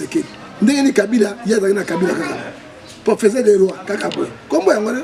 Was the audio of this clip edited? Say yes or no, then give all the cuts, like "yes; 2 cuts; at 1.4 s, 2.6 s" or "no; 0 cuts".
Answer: no; 0 cuts